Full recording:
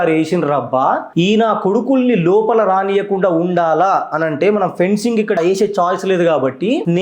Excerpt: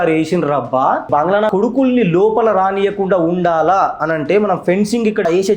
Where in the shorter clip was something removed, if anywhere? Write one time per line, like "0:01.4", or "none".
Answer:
0:01.3